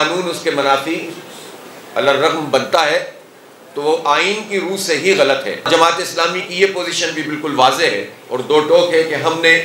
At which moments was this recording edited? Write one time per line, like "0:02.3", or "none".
0:05.7